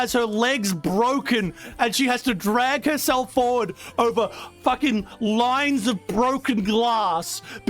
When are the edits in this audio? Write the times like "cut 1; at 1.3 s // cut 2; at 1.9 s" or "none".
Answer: none

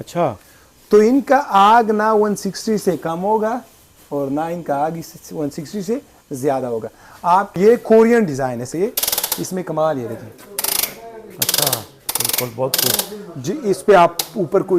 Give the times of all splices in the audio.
cut 1; at 7.6 s

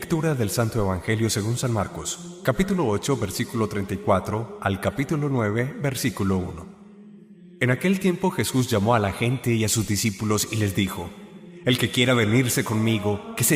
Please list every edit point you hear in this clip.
none

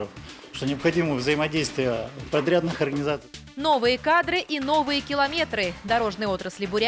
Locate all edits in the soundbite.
cut 1; at 3.3 s

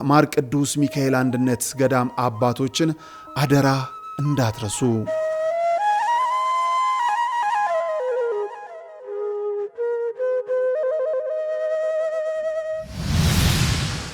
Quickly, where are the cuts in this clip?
cut 1; at 12.9 s

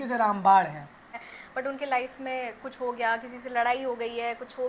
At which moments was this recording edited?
cut 1; at 1.3 s

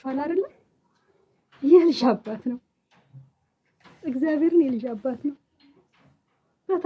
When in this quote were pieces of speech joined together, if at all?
none

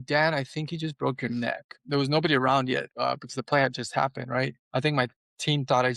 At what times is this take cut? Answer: cut 1; at 1.8 s // cut 2; at 2.9 s // cut 3; at 4.6 s

